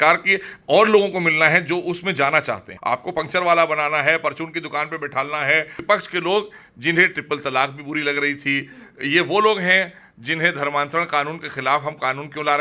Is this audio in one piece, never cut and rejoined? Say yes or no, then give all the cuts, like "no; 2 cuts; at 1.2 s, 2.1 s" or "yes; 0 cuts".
no; 2 cuts; at 2.7 s, 5.8 s